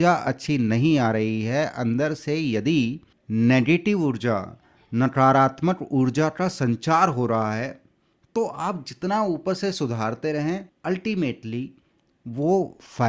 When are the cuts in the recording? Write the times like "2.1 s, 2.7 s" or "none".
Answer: 3.1 s, 10.7 s